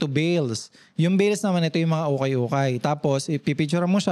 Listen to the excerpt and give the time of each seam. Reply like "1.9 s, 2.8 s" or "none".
none